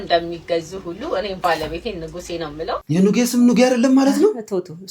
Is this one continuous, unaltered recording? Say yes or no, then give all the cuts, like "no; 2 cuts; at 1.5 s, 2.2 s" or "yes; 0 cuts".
no; 1 cut; at 2.8 s